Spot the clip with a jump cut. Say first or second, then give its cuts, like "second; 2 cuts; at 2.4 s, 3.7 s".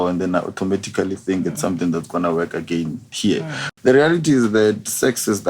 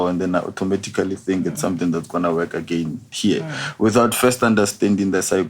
first; 1 cut; at 3.6 s